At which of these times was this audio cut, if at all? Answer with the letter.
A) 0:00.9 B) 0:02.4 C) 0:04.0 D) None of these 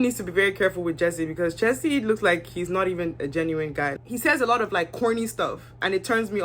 C